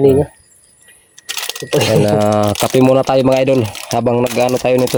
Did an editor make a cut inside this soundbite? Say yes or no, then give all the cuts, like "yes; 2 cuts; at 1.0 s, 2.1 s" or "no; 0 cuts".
no; 0 cuts